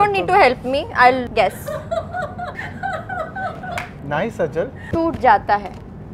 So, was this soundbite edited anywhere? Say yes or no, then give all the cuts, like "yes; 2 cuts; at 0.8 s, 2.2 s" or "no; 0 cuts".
yes; 4 cuts; at 1.3 s, 2.6 s, 4.0 s, 4.8 s